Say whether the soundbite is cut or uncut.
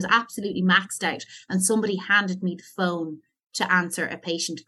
uncut